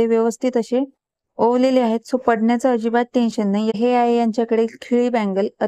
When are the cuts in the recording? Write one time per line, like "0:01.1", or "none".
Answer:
0:03.8

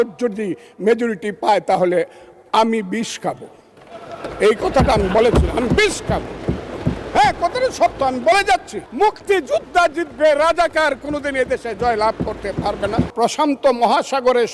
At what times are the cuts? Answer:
0:08.8
0:13.1

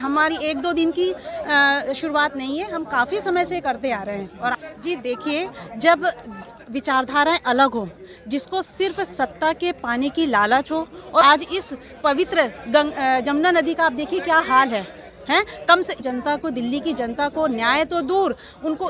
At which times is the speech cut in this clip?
0:04.4
0:11.2
0:16.0

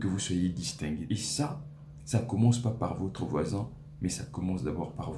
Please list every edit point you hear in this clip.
0:01.0

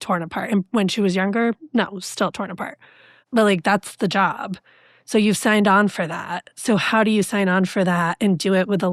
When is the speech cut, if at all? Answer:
none

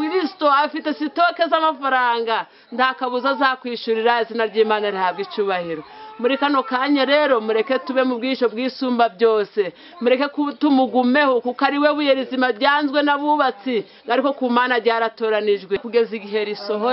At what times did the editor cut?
0:15.8

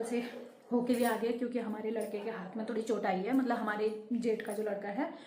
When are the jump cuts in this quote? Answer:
none

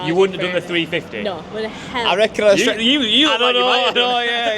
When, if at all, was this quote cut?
none

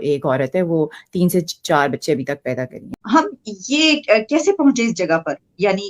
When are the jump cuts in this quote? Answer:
0:02.9

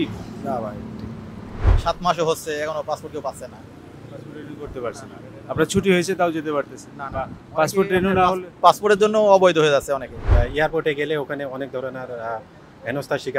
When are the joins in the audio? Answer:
0:01.5
0:10.2

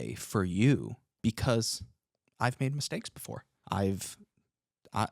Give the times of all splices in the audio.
0:01.0
0:03.5

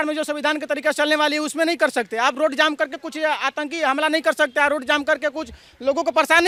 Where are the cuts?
none

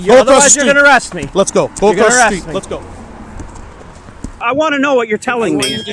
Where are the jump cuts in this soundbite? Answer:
0:04.4

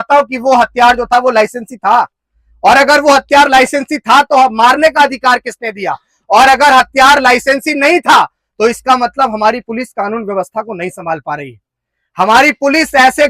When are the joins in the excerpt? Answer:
none

